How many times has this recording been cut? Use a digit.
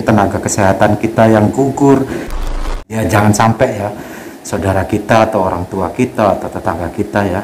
1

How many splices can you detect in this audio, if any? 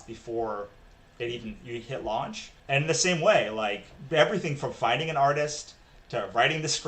2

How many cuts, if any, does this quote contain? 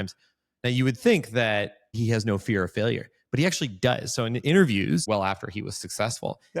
2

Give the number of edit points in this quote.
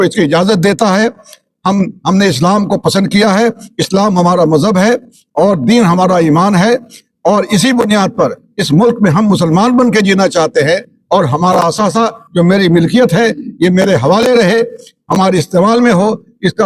0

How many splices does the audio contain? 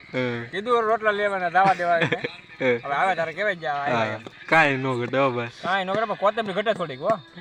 0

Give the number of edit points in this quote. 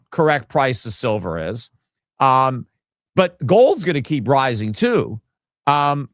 0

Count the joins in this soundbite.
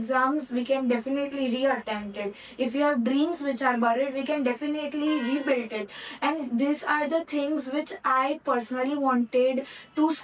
0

